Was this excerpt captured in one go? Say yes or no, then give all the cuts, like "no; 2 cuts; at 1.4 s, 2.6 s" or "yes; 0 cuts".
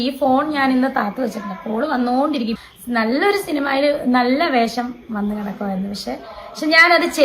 no; 1 cut; at 2.6 s